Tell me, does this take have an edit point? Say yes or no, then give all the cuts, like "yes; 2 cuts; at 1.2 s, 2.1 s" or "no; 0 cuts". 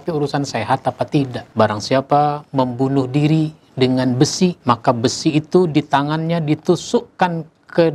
yes; 2 cuts; at 1.4 s, 4.6 s